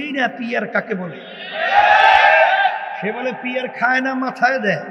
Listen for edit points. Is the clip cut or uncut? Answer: uncut